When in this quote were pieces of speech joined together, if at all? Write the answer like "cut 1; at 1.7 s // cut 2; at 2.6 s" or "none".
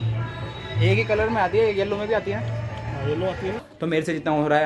cut 1; at 3.7 s